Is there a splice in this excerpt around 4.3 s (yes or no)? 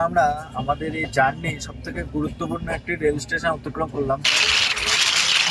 yes